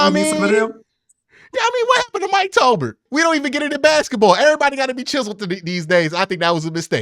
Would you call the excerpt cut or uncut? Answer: cut